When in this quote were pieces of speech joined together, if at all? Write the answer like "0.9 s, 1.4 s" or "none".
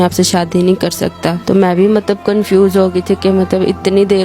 1.4 s